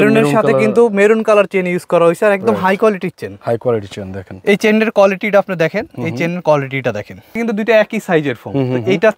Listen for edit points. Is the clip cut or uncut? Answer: cut